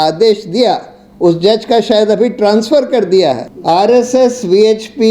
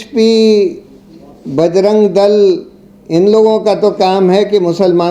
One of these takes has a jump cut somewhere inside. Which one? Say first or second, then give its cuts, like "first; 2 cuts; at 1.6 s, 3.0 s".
first; 1 cut; at 3.5 s